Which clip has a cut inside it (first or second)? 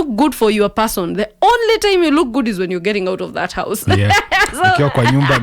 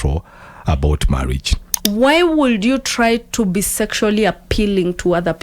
second